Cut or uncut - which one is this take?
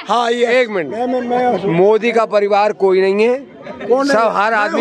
uncut